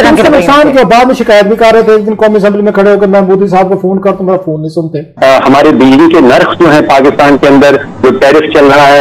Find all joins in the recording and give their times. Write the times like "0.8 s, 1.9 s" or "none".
5.0 s